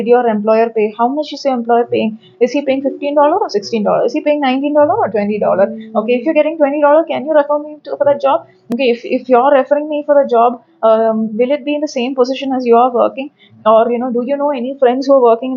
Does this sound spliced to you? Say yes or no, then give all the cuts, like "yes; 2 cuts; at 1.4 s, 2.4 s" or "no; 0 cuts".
no; 0 cuts